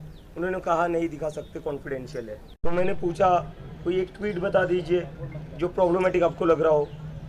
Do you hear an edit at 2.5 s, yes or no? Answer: yes